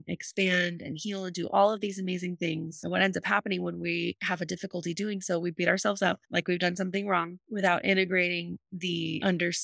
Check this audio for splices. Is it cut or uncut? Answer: uncut